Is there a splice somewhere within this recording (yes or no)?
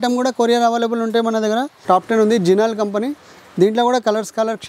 yes